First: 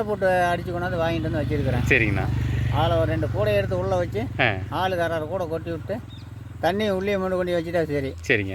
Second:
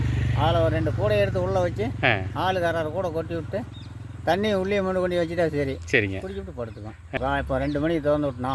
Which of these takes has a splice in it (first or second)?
second